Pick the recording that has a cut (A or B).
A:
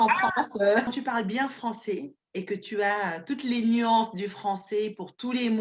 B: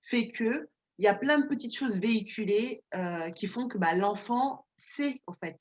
A